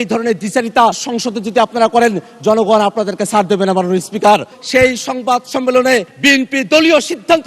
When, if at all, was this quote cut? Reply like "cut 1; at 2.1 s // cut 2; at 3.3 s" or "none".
cut 1; at 1.0 s // cut 2; at 4.6 s // cut 3; at 6.1 s